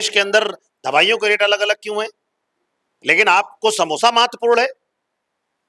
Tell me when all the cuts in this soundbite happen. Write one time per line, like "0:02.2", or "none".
none